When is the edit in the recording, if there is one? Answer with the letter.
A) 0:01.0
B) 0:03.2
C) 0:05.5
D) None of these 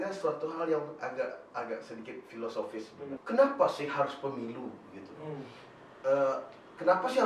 B